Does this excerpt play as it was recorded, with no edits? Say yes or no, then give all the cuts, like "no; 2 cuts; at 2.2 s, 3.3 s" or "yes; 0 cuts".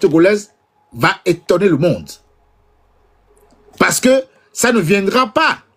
yes; 0 cuts